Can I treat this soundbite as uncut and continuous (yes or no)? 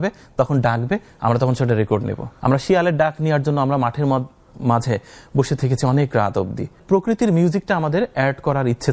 no